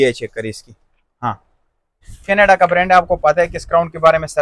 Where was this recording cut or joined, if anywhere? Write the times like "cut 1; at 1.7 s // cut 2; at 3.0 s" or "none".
cut 1; at 2.1 s